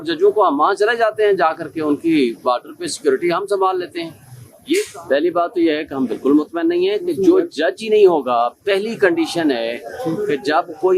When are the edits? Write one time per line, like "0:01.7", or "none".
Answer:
0:04.8